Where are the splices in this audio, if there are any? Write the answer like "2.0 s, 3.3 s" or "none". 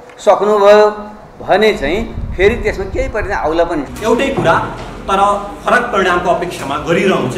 3.9 s

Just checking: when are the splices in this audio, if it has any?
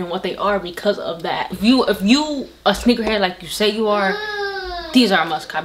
1.5 s

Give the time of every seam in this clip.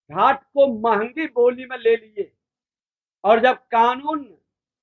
none

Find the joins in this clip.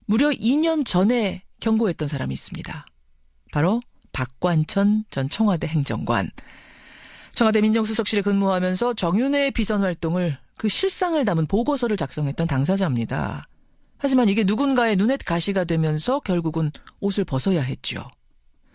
none

